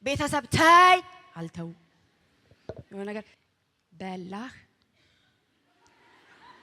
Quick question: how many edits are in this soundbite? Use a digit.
1